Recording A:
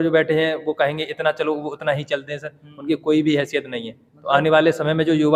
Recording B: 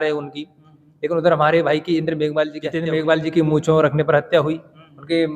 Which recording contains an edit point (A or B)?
B